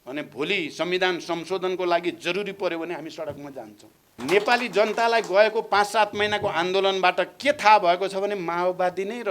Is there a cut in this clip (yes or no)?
yes